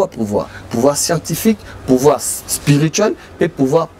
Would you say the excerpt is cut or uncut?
uncut